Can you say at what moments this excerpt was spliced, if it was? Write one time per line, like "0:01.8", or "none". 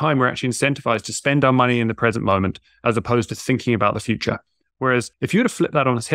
0:05.1

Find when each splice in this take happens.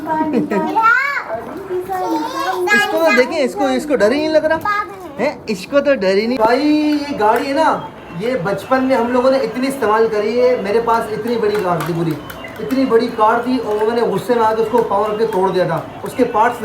0:06.4

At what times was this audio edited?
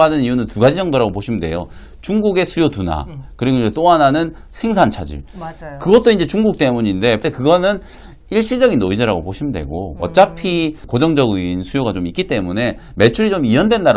0:07.2
0:10.8

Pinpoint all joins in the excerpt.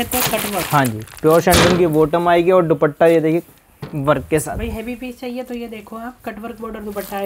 none

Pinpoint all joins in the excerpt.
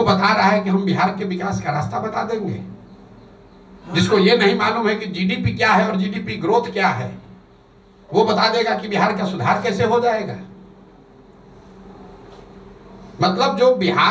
none

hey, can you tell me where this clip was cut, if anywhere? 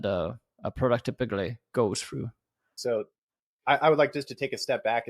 0:02.8

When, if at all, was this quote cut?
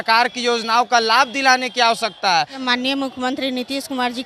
0:02.6

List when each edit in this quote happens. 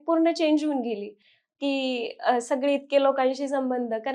none

